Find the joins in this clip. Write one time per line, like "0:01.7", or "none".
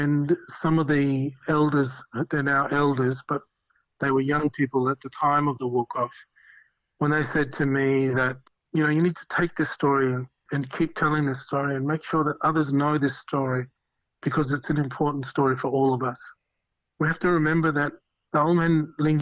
0:01.4
0:08.4